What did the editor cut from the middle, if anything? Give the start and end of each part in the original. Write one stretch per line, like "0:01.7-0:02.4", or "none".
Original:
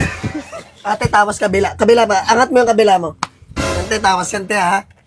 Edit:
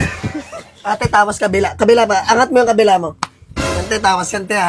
none